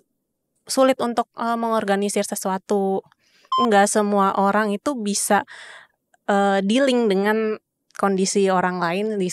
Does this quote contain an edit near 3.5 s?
yes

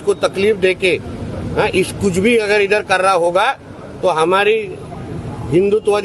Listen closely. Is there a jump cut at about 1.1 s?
no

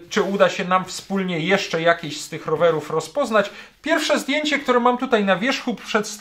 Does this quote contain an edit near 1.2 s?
no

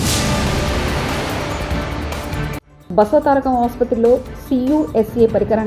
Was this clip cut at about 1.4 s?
no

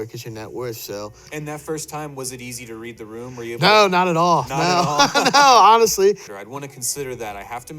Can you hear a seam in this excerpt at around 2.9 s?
no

